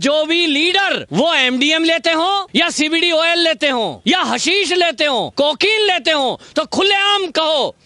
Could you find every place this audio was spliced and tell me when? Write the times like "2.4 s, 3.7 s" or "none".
1.0 s, 2.5 s, 3.9 s, 5.3 s